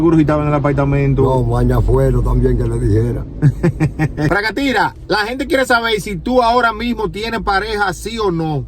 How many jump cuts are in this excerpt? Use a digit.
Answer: 1